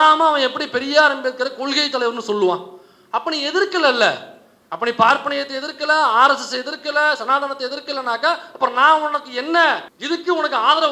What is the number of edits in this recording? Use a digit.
1